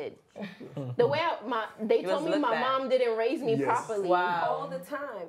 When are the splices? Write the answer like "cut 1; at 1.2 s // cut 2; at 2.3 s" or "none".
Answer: none